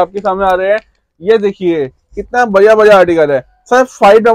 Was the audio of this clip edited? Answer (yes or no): no